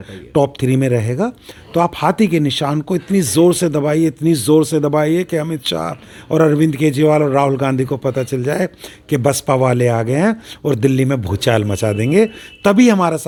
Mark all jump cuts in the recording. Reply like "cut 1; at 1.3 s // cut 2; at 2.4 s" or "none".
none

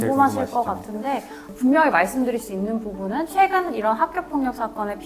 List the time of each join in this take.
cut 1; at 1.4 s

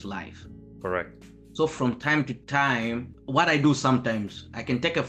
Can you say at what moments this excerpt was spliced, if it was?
cut 1; at 3.1 s

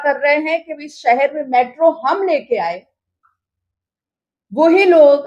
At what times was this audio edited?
none

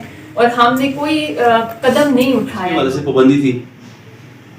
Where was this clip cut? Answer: cut 1; at 2.8 s

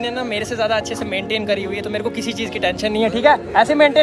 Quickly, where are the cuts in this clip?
none

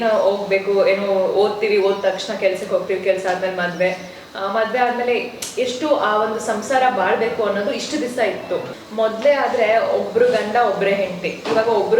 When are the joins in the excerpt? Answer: cut 1; at 8.8 s

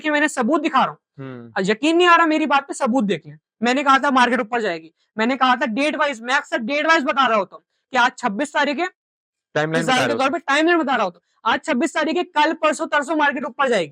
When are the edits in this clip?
none

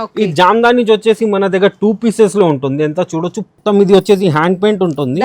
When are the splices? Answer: cut 1; at 3.5 s

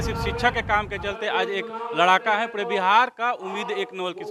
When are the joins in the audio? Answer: none

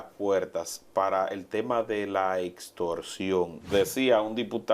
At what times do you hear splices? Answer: cut 1; at 3.7 s

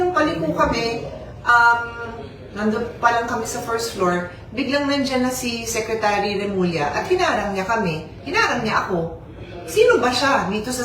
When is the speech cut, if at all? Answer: cut 1; at 1.5 s

